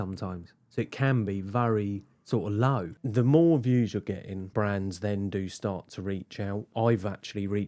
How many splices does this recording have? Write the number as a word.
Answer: three